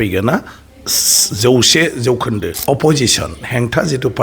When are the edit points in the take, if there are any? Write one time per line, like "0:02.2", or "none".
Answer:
0:02.5